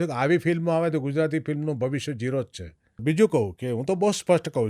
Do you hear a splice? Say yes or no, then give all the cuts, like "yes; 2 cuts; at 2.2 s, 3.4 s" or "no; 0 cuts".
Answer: yes; 1 cut; at 3.0 s